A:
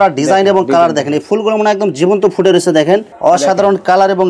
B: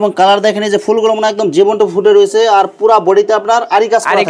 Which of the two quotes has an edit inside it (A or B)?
A